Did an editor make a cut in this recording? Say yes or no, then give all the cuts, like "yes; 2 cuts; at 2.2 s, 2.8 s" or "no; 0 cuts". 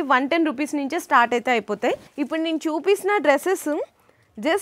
yes; 1 cut; at 2.1 s